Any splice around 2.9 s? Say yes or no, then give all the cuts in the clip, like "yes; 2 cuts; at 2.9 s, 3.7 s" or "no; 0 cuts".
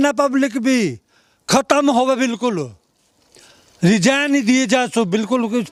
no; 0 cuts